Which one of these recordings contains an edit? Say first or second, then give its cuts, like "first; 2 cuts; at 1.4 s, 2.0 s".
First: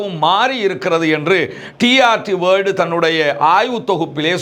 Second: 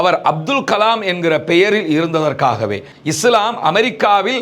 second; 1 cut; at 2.9 s